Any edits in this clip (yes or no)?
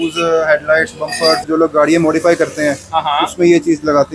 yes